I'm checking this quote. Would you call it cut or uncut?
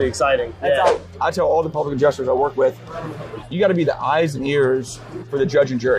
cut